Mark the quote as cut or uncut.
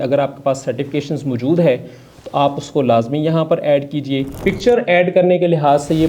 cut